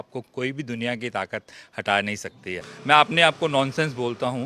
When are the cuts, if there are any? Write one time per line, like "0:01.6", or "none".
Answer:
0:02.7